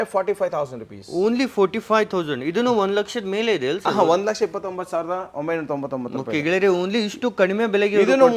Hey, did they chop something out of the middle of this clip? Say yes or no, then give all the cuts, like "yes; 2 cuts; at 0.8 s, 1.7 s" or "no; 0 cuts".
no; 0 cuts